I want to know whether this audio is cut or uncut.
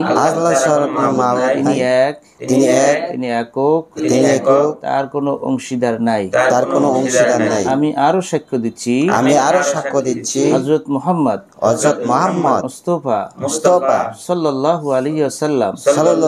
uncut